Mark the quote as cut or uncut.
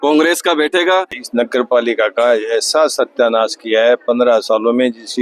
cut